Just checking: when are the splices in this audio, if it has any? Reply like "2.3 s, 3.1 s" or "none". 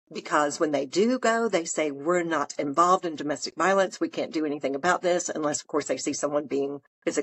none